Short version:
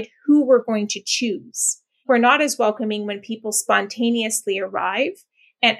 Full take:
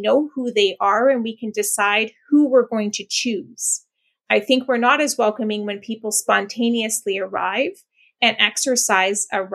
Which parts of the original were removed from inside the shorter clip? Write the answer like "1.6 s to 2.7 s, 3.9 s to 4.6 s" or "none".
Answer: 4.1 s to 4.6 s